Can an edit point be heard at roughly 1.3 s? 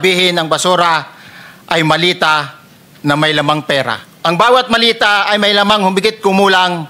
no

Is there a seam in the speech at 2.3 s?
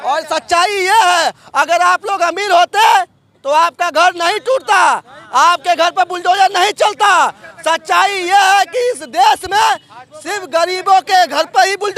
no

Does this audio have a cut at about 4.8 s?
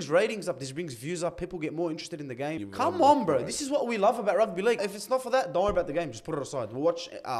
yes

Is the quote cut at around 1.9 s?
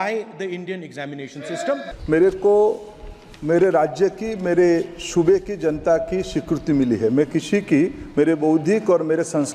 yes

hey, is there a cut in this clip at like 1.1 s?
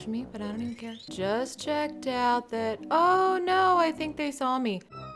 yes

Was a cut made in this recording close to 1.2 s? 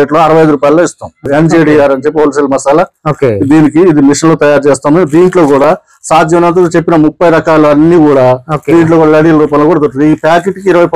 yes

